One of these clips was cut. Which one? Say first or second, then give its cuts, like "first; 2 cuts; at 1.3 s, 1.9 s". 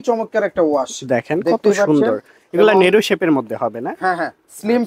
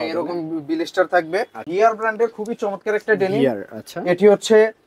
second; 1 cut; at 1.6 s